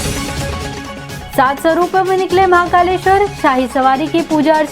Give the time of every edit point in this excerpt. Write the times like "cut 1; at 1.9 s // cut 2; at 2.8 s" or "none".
cut 1; at 1.2 s